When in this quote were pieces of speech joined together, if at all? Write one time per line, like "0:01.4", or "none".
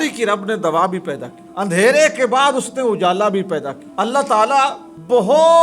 none